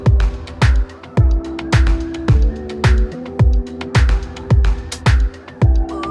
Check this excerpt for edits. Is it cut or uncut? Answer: cut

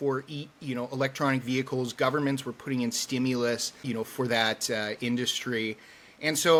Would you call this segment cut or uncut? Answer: uncut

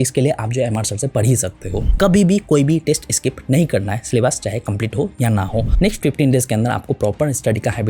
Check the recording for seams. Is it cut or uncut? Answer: cut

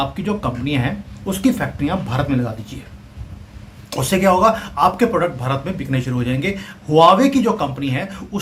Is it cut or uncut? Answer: uncut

